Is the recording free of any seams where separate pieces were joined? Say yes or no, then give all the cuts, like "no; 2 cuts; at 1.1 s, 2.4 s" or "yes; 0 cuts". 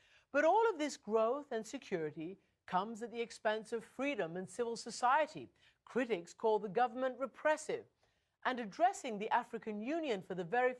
no; 1 cut; at 9.8 s